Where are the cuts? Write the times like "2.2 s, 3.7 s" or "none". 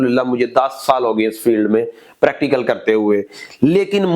none